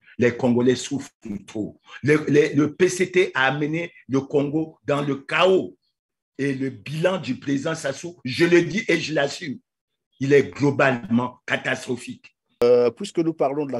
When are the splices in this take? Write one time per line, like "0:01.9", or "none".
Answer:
0:12.6